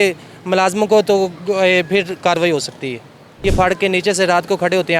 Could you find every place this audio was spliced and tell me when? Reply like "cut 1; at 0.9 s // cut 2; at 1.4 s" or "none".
cut 1; at 3.3 s